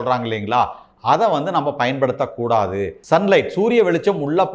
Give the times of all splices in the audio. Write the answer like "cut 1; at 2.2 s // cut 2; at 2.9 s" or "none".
cut 1; at 3.0 s